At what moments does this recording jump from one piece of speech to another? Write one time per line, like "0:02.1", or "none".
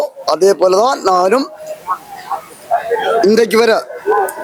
none